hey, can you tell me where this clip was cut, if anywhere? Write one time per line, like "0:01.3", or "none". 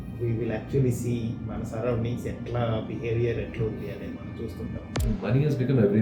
0:04.9